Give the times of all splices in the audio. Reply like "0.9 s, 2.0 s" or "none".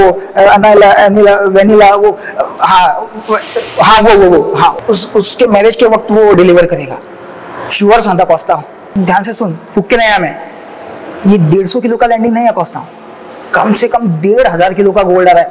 4.8 s, 8.8 s